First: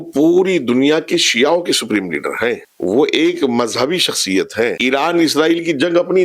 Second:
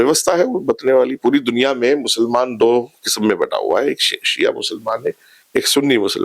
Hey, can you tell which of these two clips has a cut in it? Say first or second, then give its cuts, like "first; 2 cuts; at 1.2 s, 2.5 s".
first; 1 cut; at 4.8 s